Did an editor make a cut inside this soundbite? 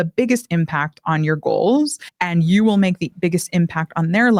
no; 0 cuts

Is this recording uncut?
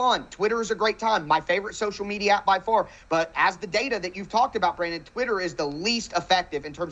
yes; 0 cuts

